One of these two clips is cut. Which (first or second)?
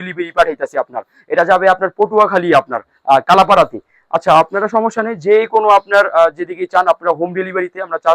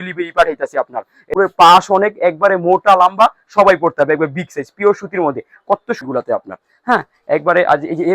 second